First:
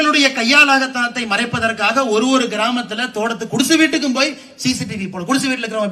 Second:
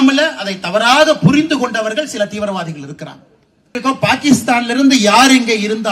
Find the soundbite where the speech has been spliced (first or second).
second